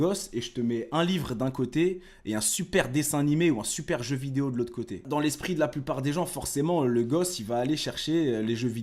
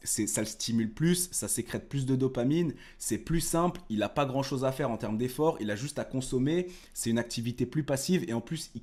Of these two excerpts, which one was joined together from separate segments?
first; 1 cut; at 5.0 s

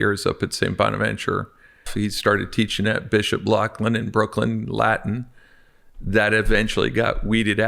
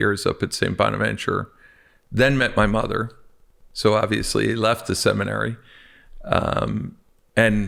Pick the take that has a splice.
first; 1 cut; at 1.9 s

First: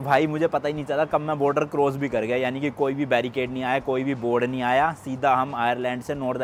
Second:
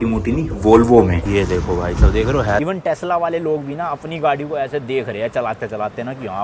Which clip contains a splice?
second; 2 cuts; at 1.2 s, 2.6 s

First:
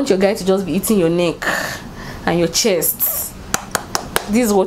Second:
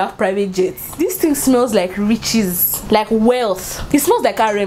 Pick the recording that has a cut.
second; 3 cuts; at 0.9 s, 2.7 s, 3.7 s

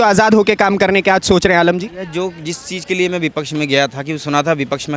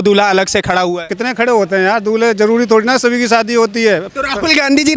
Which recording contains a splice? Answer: second; 2 cuts; at 1.1 s, 4.1 s

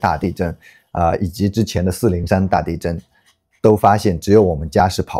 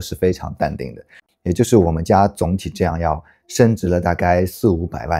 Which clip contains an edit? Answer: second; 1 cut; at 1.1 s

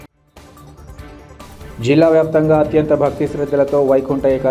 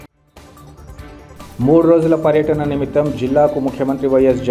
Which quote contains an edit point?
first; 1 cut; at 1.3 s

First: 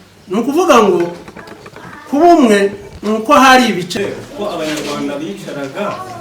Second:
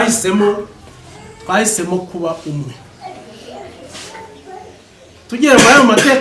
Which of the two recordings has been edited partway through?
first; 1 cut; at 3.9 s

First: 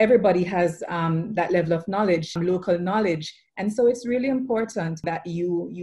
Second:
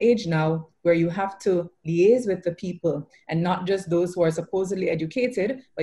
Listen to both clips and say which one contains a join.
first; 2 cuts; at 2.3 s, 5.0 s

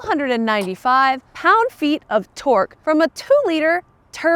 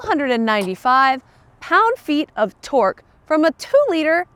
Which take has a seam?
first; 2 cuts; at 1.3 s, 2.8 s

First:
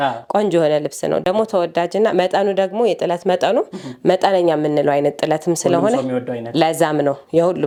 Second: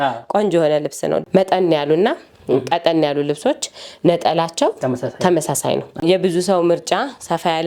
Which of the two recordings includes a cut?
second; 2 cuts; at 1.3 s, 6.0 s

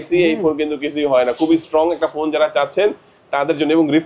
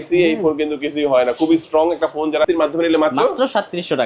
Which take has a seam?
second; 1 cut; at 2.5 s

